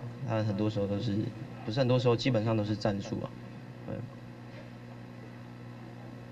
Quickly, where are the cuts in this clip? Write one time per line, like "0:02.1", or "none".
none